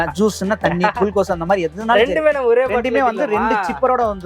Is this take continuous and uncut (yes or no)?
yes